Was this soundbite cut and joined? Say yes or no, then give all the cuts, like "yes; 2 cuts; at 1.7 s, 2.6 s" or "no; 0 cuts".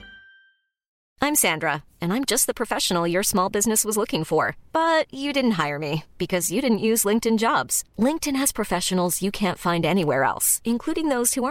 yes; 1 cut; at 1.0 s